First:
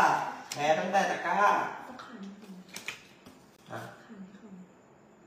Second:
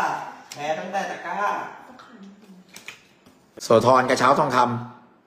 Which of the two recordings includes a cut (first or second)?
second